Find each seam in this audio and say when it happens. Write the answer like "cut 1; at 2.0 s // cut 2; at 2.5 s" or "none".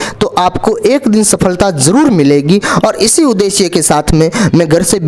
none